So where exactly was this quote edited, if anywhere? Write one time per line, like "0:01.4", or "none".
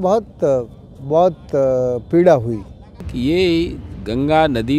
0:03.0